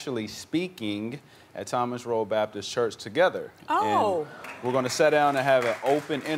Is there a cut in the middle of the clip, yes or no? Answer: yes